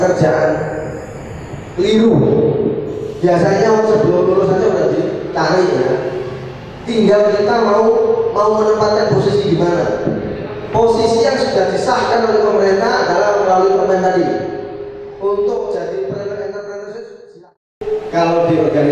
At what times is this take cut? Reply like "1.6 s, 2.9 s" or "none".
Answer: 17.8 s

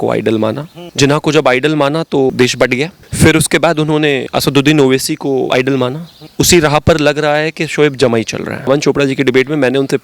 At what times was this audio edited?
2.3 s, 4.3 s, 5.5 s, 8.6 s

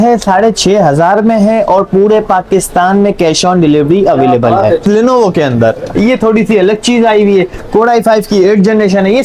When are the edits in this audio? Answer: 4.8 s

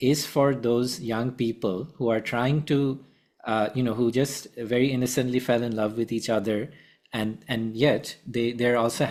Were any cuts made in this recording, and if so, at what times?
none

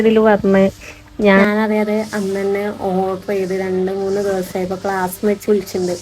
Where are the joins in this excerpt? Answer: 1.4 s

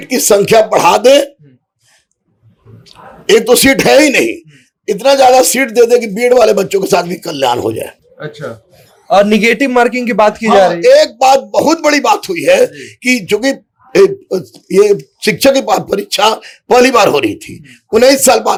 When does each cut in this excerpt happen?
none

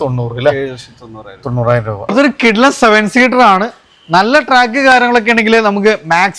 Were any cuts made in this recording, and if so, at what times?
none

